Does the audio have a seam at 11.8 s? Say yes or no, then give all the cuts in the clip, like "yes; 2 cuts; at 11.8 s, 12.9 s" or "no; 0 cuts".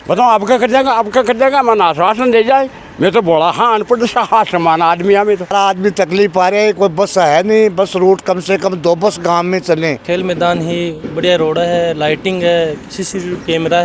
no; 2 cuts; at 5.5 s, 10.0 s